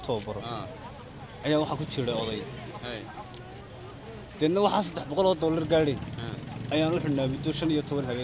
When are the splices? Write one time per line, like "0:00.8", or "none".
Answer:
none